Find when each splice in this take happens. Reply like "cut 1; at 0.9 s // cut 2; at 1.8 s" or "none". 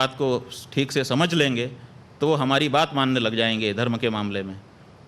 cut 1; at 3.3 s

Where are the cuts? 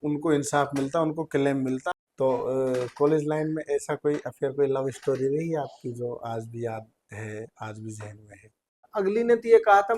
cut 1; at 2.0 s // cut 2; at 8.9 s

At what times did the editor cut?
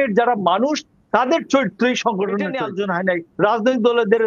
cut 1; at 2.6 s

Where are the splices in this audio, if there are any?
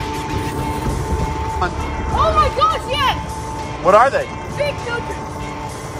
cut 1; at 1.6 s

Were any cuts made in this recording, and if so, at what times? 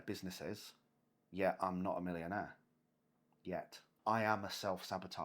cut 1; at 3.9 s

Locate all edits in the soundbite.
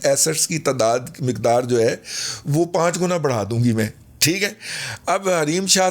none

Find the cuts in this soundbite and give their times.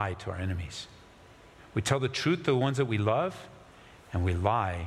none

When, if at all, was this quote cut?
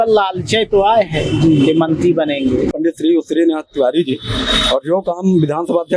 cut 1; at 2.7 s

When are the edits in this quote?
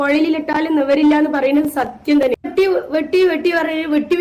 cut 1; at 2.5 s

